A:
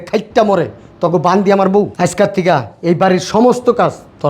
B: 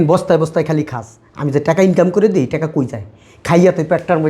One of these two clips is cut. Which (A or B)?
A